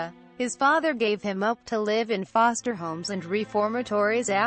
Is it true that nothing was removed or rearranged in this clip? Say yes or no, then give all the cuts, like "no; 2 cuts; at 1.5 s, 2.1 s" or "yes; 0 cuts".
no; 1 cut; at 3.5 s